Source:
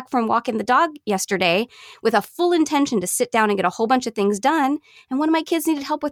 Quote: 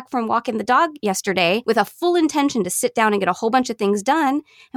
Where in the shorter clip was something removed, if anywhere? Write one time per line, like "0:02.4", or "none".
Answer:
0:01.3